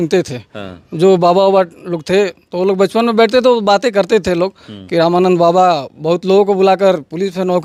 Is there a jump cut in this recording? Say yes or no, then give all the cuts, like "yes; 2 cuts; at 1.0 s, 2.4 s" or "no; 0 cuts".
no; 0 cuts